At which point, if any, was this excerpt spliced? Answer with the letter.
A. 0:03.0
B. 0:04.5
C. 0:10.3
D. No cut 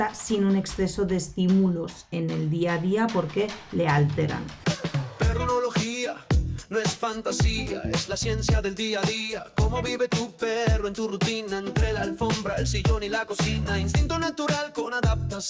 B